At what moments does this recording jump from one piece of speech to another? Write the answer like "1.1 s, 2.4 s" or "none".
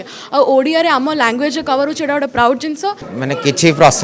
3.1 s